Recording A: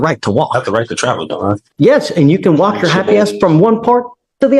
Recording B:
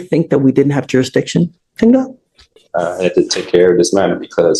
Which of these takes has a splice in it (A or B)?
A